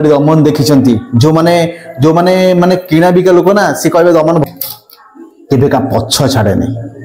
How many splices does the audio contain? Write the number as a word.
one